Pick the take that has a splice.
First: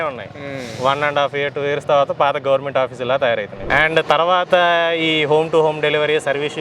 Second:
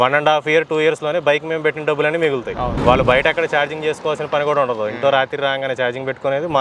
first; 1 cut; at 3.6 s

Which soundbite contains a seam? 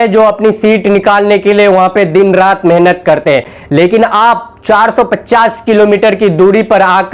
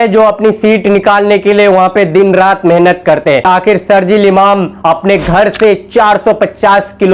second; 1 cut; at 3.5 s

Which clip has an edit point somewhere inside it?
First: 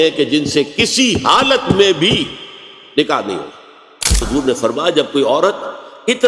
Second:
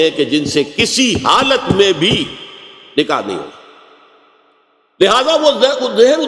first; 1 cut; at 4.3 s

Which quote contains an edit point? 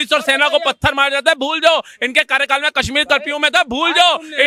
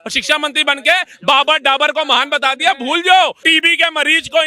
second; 1 cut; at 3.4 s

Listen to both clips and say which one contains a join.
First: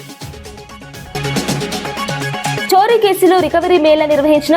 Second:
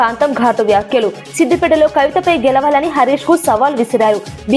first; 1 cut; at 0.9 s

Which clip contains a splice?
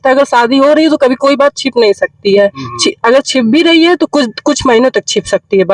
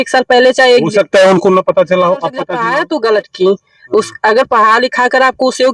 second; 1 cut; at 2.5 s

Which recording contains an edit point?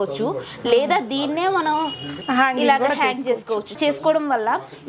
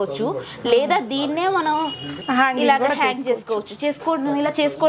first; 1 cut; at 3.8 s

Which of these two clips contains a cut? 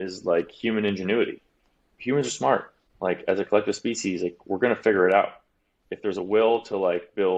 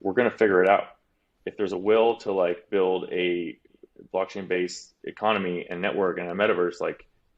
second; 1 cut; at 4.9 s

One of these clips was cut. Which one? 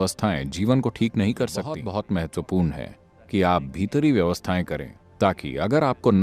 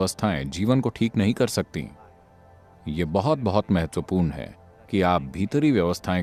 first; 2 cuts; at 1.8 s, 5.0 s

